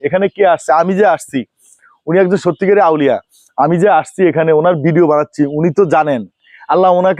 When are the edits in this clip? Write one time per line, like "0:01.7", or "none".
none